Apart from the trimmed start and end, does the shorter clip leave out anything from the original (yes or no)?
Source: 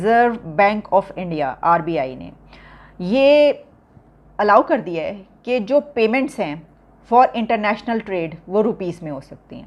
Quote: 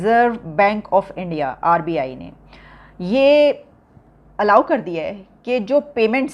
no